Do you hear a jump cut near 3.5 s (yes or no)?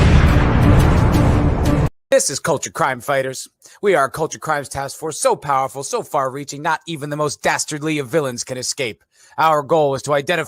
no